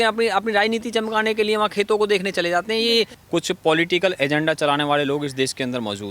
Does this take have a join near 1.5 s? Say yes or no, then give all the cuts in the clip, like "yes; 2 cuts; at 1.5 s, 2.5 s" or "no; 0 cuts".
no; 1 cut; at 3.2 s